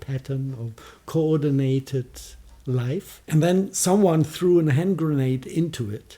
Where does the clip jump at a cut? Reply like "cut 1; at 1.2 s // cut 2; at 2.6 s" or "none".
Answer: cut 1; at 3.2 s